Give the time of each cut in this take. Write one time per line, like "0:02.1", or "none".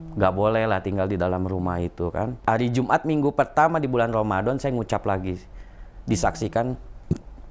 0:02.4